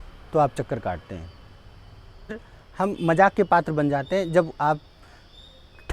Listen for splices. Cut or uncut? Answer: cut